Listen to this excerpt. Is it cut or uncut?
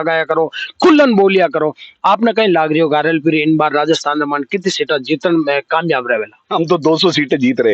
uncut